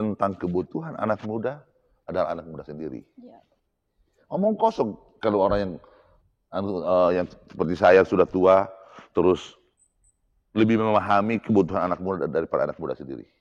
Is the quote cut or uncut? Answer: uncut